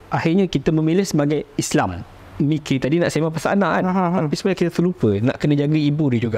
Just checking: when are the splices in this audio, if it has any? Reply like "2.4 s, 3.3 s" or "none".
2.1 s

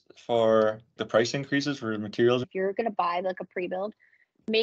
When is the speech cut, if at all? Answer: 2.4 s

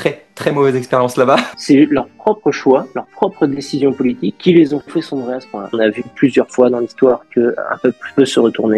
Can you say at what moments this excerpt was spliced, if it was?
1.5 s, 5.7 s

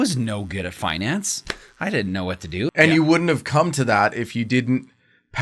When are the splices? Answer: 2.7 s

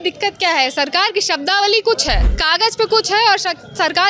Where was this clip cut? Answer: 2.3 s

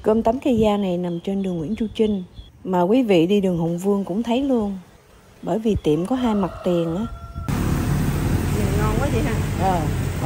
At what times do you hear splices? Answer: none

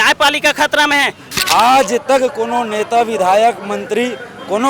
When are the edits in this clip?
1.2 s

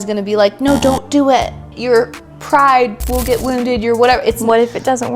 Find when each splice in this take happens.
1.8 s

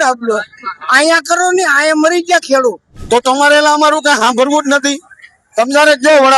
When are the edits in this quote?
2.9 s

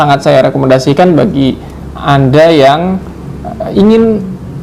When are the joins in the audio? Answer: none

